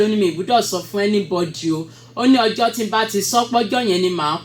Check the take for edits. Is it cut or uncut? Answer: uncut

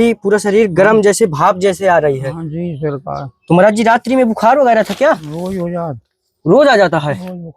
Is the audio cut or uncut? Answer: uncut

